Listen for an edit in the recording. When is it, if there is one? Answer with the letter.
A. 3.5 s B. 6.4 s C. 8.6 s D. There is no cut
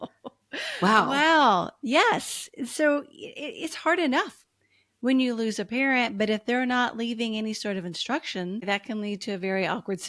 C